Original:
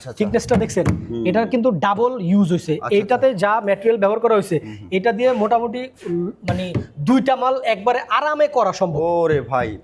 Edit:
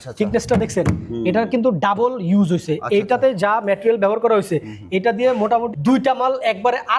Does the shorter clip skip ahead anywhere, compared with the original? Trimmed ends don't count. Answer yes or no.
yes